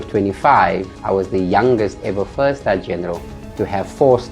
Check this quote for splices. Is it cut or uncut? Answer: cut